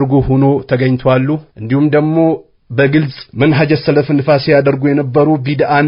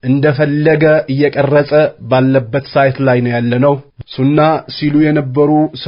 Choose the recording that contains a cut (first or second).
second